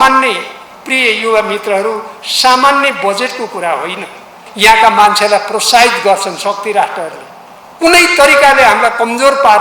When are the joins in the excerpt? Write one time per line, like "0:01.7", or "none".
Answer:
0:04.4